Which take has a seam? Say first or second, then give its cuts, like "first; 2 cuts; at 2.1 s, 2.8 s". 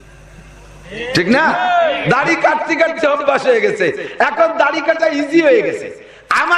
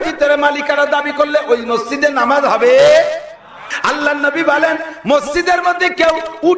second; 1 cut; at 3.6 s